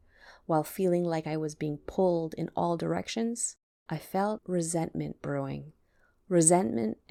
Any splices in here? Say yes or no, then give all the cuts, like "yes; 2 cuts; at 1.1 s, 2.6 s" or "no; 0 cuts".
no; 0 cuts